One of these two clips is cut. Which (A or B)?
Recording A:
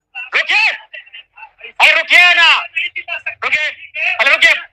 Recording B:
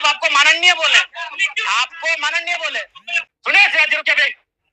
B